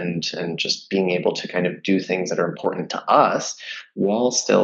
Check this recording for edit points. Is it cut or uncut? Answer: uncut